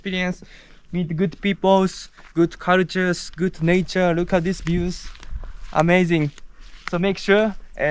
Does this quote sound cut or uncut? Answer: uncut